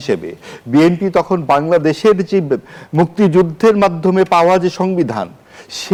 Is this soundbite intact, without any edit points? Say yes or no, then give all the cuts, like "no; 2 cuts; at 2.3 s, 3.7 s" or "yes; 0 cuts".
yes; 0 cuts